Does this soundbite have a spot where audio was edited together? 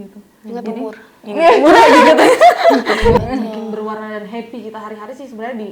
yes; 1 cut; at 3.2 s

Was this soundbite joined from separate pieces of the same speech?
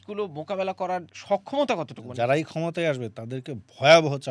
yes; 2 cuts; at 1.1 s, 2.0 s

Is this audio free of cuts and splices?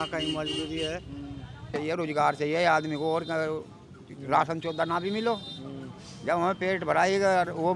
no; 1 cut; at 1.7 s

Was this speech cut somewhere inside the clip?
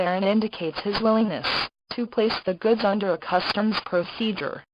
no; 0 cuts

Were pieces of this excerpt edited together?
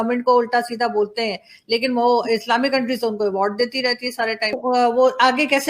yes; 1 cut; at 4.6 s

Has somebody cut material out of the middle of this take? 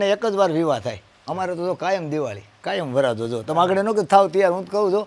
no; 0 cuts

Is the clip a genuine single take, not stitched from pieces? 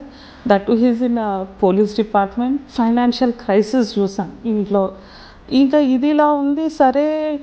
no; 1 cut; at 2.7 s

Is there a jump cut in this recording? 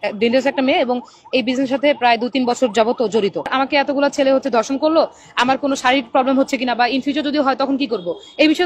yes; 1 cut; at 3.5 s

